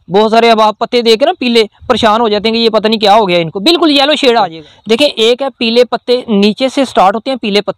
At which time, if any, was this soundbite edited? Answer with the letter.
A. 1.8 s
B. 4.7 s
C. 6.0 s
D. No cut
B